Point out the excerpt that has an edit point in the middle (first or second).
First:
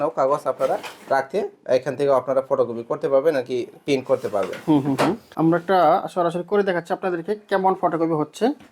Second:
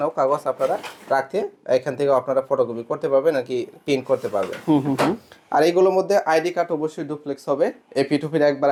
first